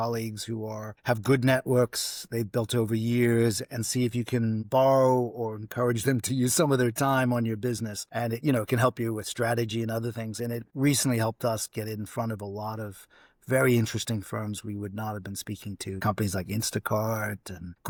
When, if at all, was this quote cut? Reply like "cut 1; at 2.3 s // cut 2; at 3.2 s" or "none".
none

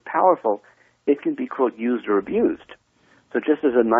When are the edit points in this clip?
none

